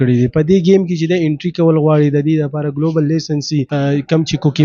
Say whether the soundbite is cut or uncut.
cut